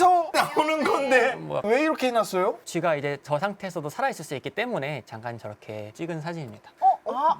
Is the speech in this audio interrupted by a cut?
yes; 1 cut; at 1.6 s

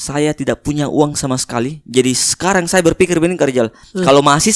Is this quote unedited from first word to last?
yes; 0 cuts

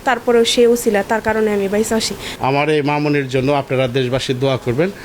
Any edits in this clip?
yes; 1 cut; at 2.2 s

